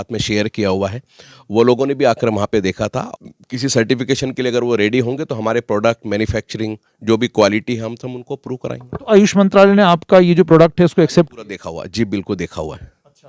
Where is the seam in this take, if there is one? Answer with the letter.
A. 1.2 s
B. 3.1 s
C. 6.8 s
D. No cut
B